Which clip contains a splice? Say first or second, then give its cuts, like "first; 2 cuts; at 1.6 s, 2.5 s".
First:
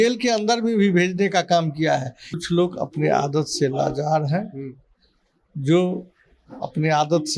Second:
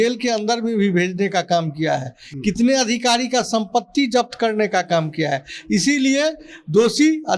first; 1 cut; at 2.4 s